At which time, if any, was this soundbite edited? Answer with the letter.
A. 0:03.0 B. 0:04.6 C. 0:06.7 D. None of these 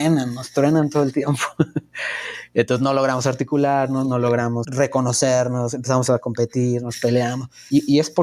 B